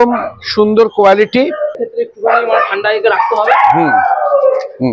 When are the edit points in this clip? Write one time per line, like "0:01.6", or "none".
0:01.9